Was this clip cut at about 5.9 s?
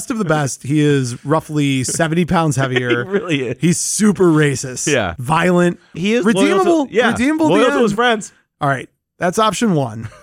yes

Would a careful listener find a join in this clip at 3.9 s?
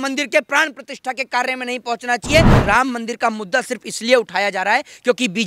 no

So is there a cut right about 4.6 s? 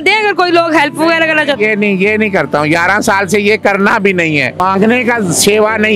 yes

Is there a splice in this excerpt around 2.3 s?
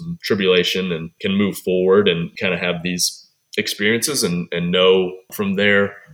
yes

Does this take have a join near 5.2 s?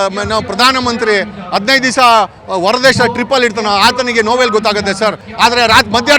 yes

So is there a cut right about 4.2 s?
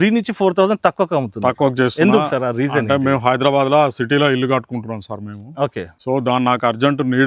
no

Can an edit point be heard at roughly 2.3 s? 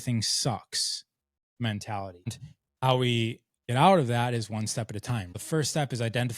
yes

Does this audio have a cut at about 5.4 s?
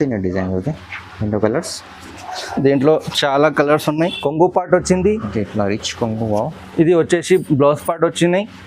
no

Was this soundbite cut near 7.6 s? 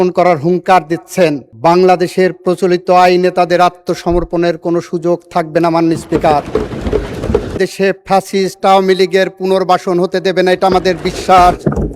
yes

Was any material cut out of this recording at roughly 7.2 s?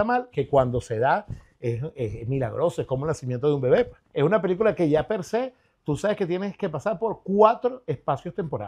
no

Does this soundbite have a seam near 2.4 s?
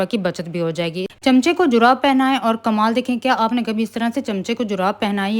no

